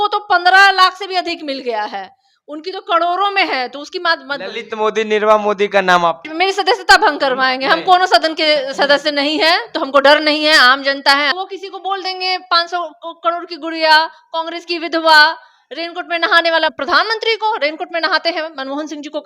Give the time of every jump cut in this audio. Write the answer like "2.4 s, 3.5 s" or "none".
6.3 s, 11.3 s, 16.8 s